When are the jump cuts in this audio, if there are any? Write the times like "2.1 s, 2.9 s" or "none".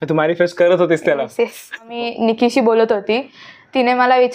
1.9 s